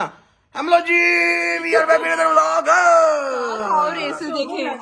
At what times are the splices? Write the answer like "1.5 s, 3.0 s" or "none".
none